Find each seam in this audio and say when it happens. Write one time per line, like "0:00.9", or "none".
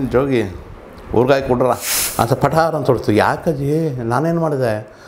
0:02.0